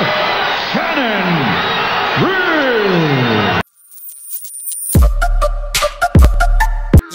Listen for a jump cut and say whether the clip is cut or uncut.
cut